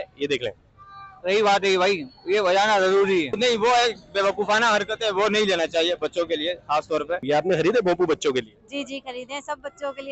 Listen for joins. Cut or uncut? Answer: cut